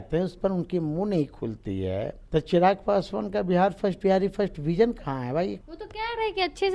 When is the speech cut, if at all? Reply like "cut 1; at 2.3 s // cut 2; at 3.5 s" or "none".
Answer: cut 1; at 2.2 s // cut 2; at 5.6 s

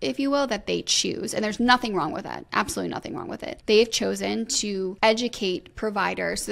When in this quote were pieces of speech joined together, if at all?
cut 1; at 3.5 s // cut 2; at 4.9 s

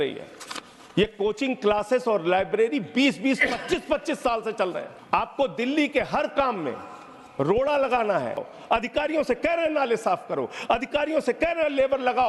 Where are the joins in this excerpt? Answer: cut 1; at 4.9 s // cut 2; at 8.5 s

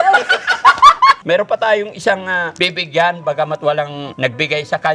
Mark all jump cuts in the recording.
cut 1; at 1.2 s // cut 2; at 2.5 s // cut 3; at 4.0 s

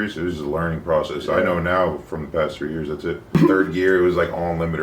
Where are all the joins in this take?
cut 1; at 3.3 s

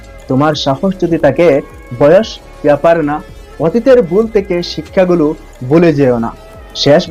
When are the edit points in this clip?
none

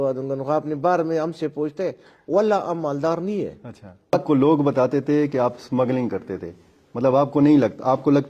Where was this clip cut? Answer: cut 1; at 4.1 s

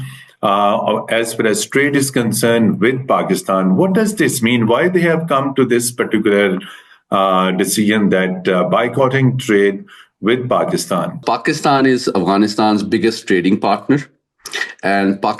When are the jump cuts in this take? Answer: cut 1; at 11.2 s

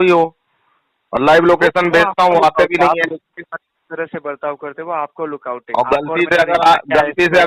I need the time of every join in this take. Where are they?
none

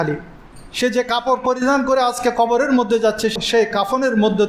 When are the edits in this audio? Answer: cut 1; at 3.3 s

